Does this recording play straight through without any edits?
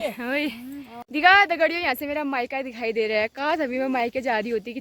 no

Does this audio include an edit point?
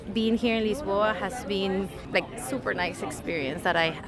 yes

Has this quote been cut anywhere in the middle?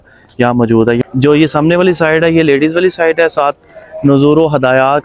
yes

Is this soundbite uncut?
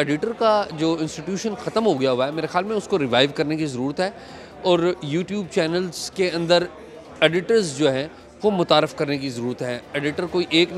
yes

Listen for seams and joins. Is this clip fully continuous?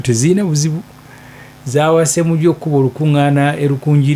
yes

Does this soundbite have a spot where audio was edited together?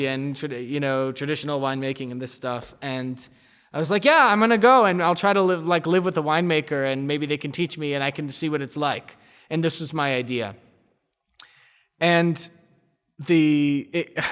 no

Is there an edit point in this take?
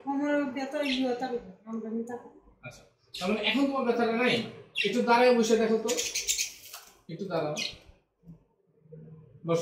no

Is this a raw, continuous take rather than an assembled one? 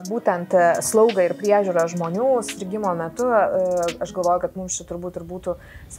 yes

